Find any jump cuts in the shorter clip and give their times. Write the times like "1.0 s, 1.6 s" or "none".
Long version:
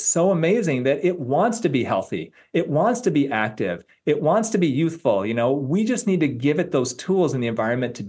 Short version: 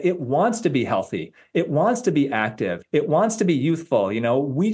2.8 s